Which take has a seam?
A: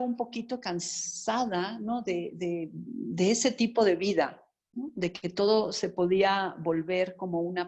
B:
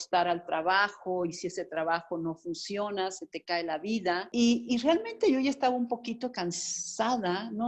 B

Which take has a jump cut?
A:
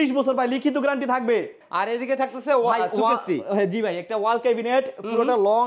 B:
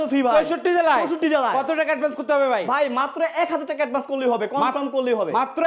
A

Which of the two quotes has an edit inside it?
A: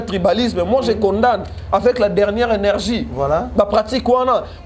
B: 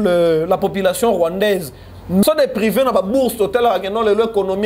B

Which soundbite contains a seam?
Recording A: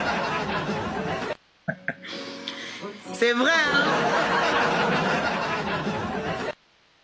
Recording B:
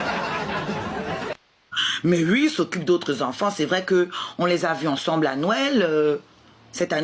B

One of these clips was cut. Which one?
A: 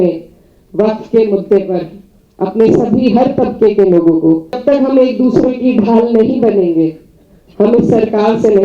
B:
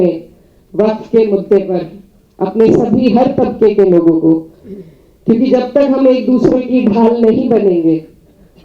A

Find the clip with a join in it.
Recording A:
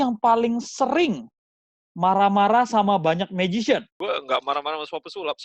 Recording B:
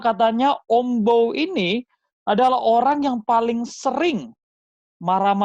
A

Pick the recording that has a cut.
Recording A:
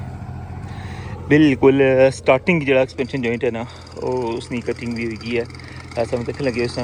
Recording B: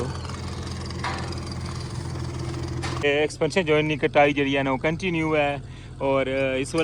B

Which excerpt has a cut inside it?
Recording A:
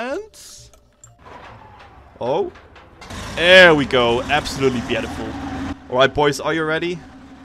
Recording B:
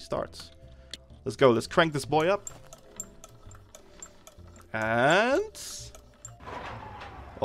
A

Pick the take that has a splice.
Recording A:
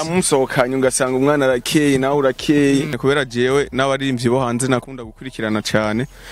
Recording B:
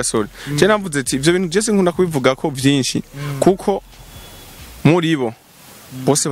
A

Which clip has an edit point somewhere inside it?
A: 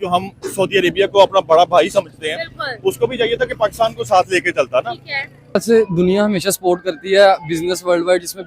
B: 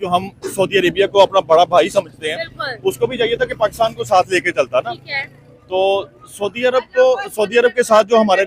A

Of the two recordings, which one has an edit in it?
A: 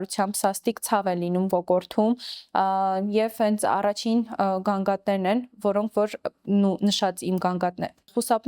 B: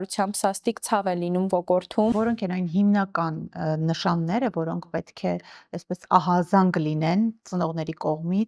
B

